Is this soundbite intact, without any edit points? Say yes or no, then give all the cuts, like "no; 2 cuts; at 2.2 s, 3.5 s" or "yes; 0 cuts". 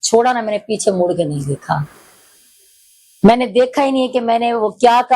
yes; 0 cuts